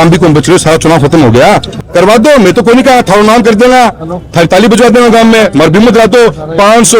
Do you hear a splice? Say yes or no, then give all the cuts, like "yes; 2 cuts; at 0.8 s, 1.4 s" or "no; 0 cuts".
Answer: yes; 1 cut; at 1.7 s